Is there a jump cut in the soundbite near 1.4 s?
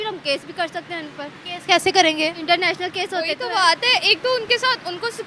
no; 1 cut; at 3.4 s

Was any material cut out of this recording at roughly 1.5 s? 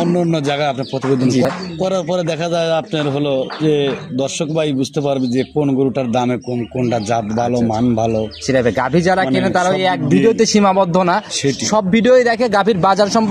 yes; 1 cut; at 1.5 s

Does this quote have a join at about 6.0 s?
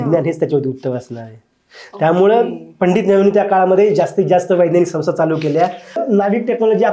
yes; 1 cut; at 6.0 s

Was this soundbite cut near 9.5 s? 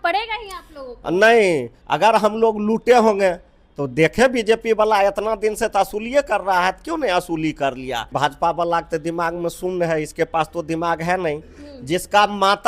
no; 2 cuts; at 1.8 s, 8.1 s

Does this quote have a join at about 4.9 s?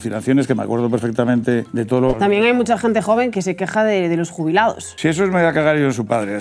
yes; 3 cuts; at 1.8 s, 3.3 s, 4.9 s

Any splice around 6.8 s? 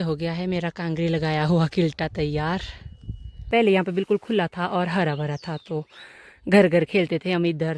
no; 1 cut; at 3.5 s

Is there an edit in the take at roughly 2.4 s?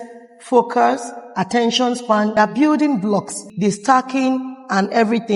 yes; 2 cuts; at 2.4 s, 3.5 s

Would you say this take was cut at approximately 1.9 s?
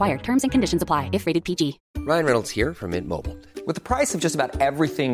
yes; 1 cut; at 1.9 s

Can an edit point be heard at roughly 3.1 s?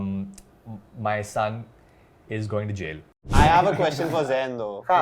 yes; 1 cut; at 3.1 s

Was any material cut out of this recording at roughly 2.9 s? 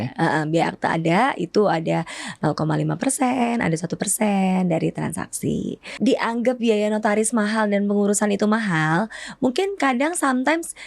no; 1 cut; at 5.8 s

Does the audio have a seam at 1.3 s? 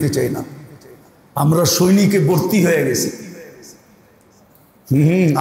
yes; 1 cut; at 1.3 s

